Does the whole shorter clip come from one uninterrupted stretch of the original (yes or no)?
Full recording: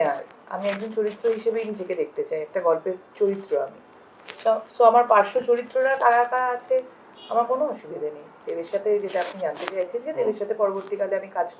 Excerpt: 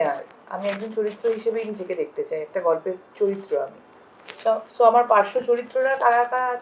yes